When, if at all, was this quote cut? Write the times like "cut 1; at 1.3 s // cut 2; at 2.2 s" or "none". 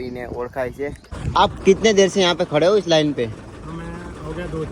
cut 1; at 1.1 s

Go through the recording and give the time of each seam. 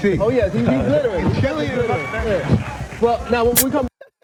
none

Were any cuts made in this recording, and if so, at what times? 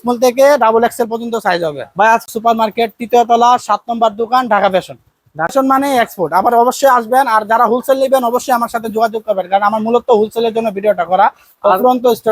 cut 1; at 2.2 s // cut 2; at 5.5 s

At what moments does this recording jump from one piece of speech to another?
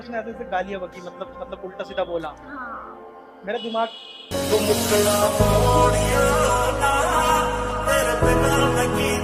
none

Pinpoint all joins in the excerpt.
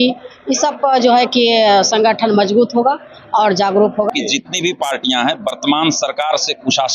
cut 1; at 4.1 s

